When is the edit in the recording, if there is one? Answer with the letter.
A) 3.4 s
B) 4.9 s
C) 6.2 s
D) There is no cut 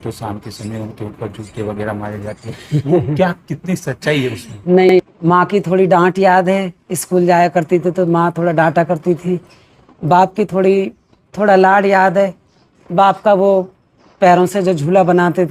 B